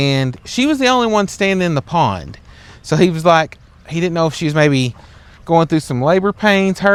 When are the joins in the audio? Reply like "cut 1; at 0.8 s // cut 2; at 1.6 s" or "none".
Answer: none